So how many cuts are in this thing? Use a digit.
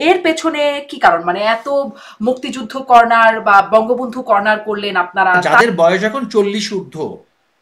1